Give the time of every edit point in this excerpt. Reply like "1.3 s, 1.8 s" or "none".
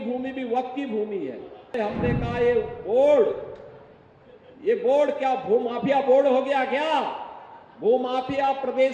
1.7 s